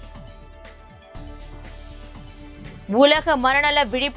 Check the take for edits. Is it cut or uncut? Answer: cut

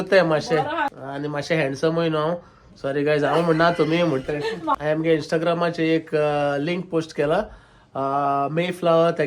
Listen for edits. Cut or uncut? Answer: cut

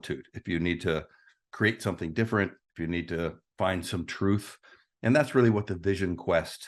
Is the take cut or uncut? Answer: uncut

